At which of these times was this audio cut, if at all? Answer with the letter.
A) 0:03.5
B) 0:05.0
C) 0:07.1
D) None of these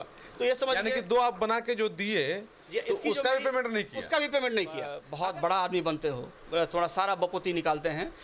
B